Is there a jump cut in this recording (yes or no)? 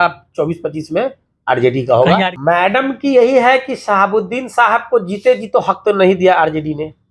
yes